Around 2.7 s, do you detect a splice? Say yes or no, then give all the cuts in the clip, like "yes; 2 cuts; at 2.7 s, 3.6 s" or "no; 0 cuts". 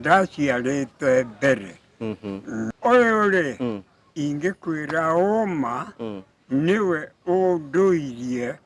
yes; 1 cut; at 2.7 s